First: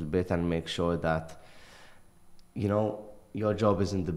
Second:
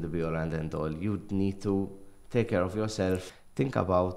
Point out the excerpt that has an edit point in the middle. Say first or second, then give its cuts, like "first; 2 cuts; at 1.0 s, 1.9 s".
second; 1 cut; at 3.2 s